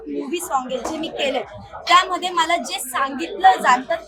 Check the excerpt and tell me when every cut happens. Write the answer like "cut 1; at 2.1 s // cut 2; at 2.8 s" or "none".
none